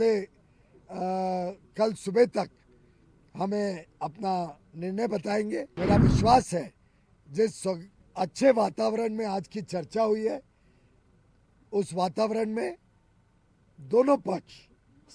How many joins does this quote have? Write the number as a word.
one